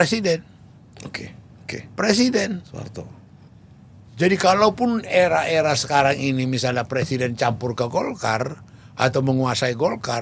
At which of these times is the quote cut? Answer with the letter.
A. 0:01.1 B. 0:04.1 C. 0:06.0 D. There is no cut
D